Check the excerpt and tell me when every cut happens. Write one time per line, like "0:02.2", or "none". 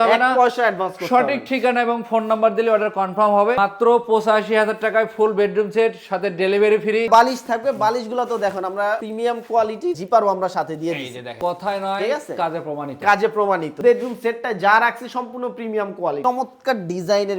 0:03.6
0:07.1
0:11.3
0:13.8
0:16.2